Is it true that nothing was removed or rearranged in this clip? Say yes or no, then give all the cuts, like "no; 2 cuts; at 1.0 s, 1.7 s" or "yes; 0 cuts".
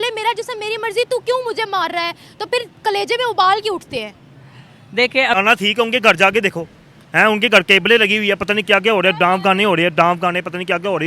no; 1 cut; at 5.4 s